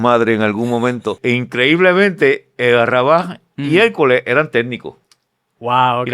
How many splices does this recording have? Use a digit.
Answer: 1